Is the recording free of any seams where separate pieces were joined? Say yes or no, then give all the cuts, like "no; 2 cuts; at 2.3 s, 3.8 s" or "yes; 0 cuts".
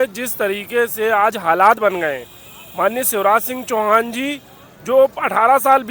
yes; 0 cuts